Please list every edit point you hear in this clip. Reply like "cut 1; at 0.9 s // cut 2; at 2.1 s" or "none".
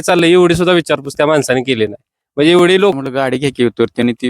cut 1; at 3.0 s

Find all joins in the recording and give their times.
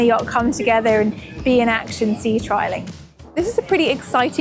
cut 1; at 3.4 s

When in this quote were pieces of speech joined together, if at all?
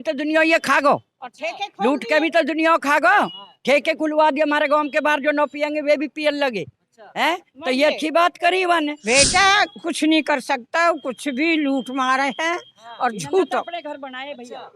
cut 1; at 9.0 s

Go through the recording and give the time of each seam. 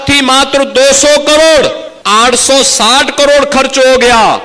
cut 1; at 1.9 s

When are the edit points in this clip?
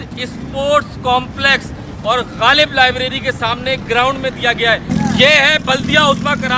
cut 1; at 4.8 s

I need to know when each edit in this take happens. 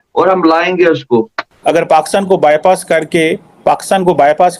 cut 1; at 1.4 s

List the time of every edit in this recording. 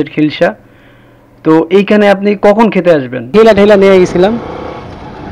cut 1; at 3.3 s

